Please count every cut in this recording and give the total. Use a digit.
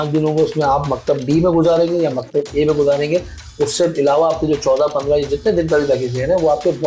0